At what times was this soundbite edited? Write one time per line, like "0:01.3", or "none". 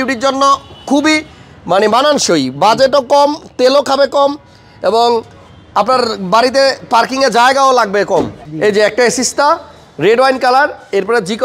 0:08.4